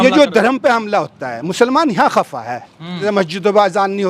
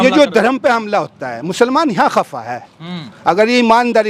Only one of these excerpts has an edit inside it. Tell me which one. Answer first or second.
first